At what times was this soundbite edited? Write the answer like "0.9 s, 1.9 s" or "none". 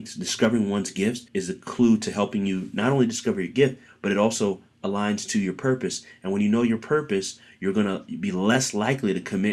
1.3 s